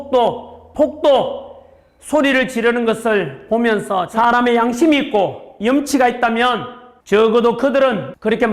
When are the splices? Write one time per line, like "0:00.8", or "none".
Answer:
0:04.1